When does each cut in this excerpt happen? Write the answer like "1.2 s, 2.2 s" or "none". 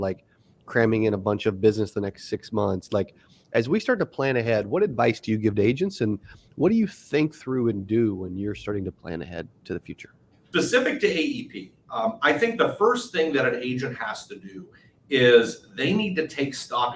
10.4 s